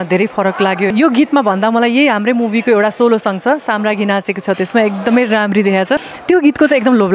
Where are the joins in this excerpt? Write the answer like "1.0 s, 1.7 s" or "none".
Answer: 0.9 s, 6.1 s